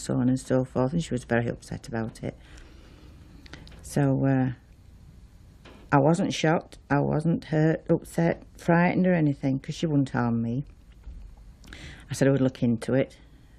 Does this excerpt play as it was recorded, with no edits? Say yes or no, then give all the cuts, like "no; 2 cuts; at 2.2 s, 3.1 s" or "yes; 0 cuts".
yes; 0 cuts